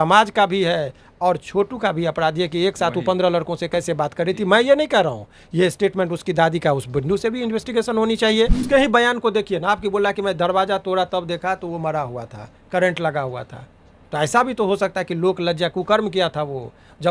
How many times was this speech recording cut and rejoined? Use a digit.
1